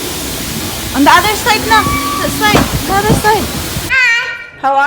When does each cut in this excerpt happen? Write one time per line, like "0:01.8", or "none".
0:03.8